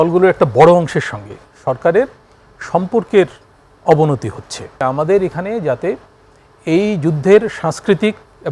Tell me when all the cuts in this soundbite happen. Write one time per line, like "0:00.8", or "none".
0:04.7